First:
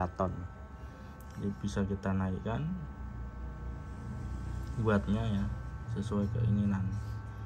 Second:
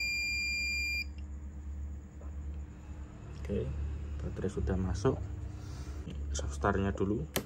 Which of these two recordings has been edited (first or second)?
second